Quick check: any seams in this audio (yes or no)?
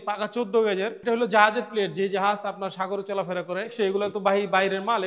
yes